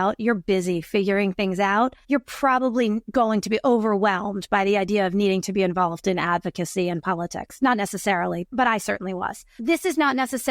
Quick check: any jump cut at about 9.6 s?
yes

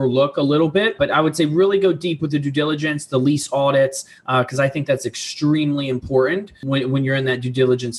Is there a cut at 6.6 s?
yes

